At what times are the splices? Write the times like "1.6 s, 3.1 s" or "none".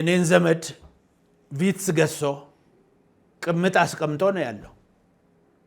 none